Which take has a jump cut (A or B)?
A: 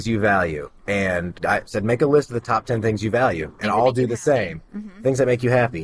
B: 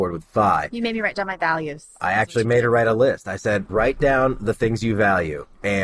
B